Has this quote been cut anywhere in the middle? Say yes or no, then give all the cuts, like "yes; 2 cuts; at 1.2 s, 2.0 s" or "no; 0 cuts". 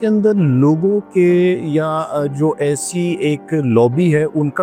no; 0 cuts